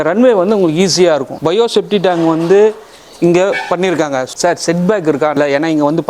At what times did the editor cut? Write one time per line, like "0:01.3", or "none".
0:01.3
0:04.2
0:05.4